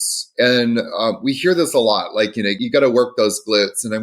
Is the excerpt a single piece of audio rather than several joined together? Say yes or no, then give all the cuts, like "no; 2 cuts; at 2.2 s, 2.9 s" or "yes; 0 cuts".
no; 1 cut; at 2.5 s